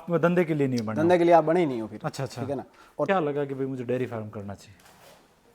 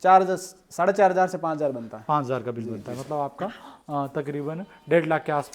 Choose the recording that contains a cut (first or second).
first